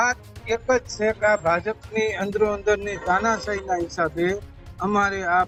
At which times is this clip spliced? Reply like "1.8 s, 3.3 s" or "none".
none

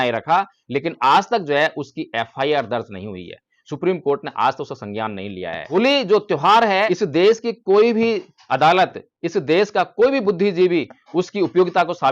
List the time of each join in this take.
5.6 s, 6.9 s

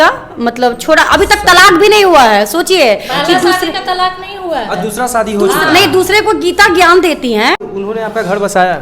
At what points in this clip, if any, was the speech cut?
7.6 s

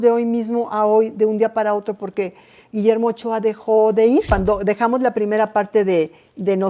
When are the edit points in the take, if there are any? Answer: 4.3 s

